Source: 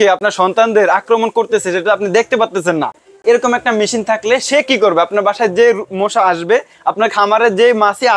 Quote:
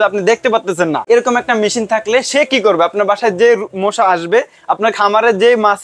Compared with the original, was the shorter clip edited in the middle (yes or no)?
yes